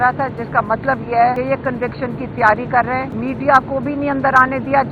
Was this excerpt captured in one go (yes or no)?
no